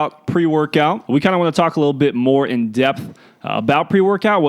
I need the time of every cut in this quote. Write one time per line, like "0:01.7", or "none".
0:01.0